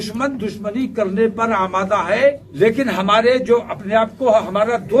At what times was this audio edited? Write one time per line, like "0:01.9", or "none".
0:02.5